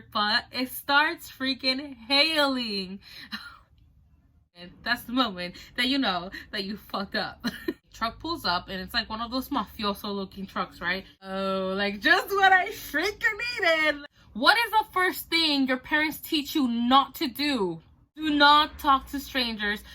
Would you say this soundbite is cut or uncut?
cut